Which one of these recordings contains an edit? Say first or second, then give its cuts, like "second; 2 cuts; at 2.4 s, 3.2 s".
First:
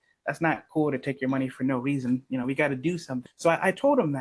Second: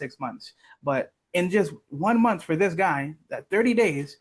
first; 1 cut; at 3.2 s